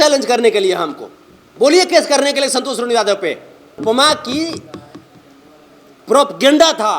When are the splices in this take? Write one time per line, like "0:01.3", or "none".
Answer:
0:03.8